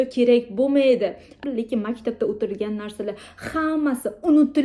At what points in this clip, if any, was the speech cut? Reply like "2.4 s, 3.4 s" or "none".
1.3 s